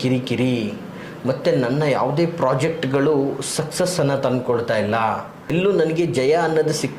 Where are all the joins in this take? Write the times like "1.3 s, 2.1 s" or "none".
5.5 s